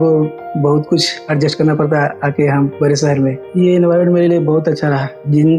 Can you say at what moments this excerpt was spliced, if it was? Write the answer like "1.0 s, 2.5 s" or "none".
3.4 s